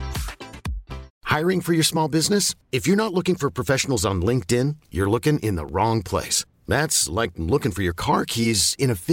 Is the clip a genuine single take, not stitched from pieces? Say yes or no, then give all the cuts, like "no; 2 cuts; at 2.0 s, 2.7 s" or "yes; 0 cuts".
no; 1 cut; at 1.1 s